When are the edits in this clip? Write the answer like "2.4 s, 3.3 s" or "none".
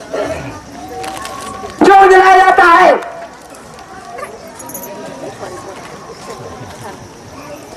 none